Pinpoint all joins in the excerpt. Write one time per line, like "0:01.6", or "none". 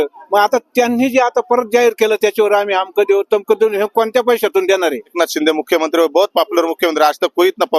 0:05.1